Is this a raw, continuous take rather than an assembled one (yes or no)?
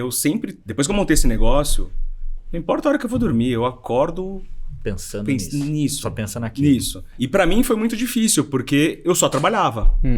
no